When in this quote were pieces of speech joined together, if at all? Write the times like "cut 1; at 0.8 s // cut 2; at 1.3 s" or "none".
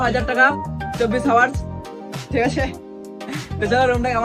none